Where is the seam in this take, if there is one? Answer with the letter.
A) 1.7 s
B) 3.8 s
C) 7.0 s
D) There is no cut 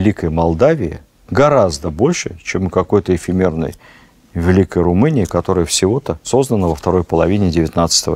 D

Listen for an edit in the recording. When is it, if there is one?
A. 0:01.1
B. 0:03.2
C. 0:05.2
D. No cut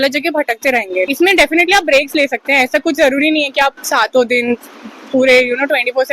A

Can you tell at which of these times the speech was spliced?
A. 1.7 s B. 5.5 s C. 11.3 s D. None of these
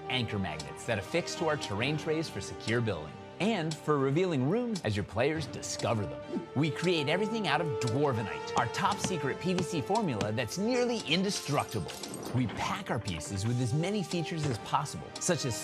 D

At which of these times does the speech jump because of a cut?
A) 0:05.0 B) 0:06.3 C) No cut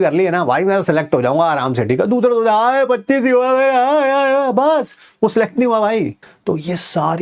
B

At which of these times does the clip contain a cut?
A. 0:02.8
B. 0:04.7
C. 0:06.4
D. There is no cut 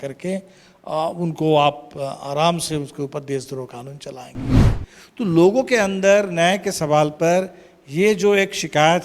B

